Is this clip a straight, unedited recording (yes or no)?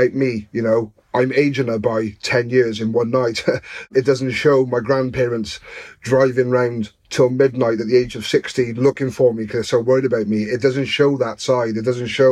no